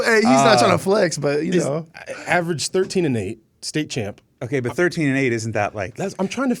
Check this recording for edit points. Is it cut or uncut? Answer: uncut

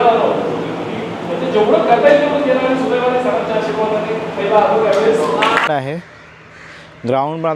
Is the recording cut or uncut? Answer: cut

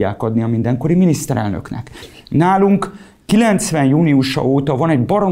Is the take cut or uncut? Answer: uncut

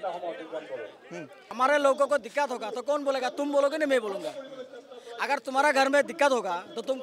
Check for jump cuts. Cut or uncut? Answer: cut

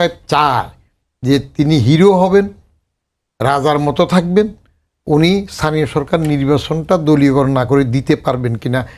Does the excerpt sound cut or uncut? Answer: uncut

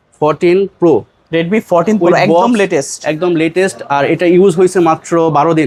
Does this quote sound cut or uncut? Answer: uncut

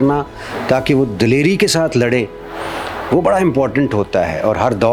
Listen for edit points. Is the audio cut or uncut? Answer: uncut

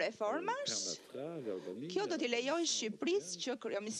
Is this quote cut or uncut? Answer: uncut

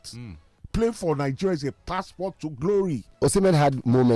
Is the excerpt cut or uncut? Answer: cut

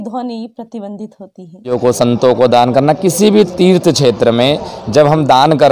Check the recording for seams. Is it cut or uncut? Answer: cut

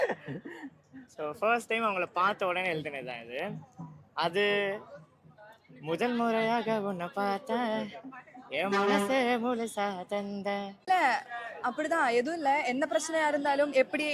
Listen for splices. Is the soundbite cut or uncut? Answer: cut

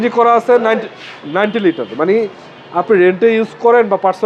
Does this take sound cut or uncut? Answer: uncut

